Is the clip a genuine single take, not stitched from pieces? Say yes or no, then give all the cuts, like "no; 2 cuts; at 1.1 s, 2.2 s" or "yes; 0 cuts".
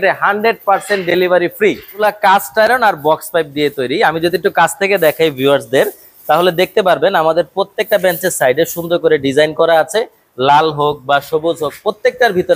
no; 1 cut; at 2.0 s